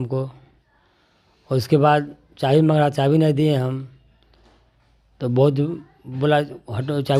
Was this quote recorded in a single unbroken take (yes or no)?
yes